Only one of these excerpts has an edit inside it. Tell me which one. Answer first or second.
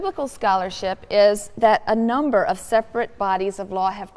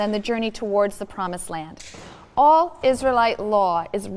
first